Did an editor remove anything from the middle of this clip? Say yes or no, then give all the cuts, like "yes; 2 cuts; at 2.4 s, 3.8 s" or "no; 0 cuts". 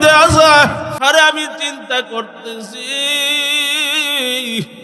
yes; 1 cut; at 0.9 s